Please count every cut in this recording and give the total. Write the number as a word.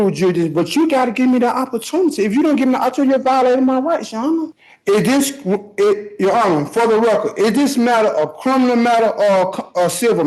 one